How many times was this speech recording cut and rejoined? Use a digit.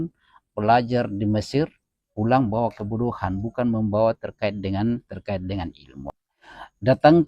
1